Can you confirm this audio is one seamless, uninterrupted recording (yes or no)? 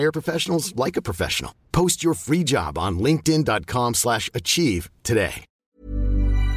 no